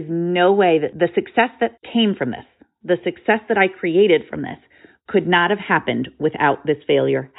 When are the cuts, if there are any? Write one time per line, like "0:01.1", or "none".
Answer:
0:00.9
0:01.8